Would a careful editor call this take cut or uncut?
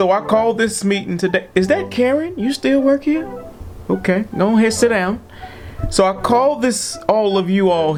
uncut